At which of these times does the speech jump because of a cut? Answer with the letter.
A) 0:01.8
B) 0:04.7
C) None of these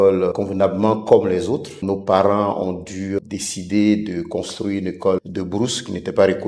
A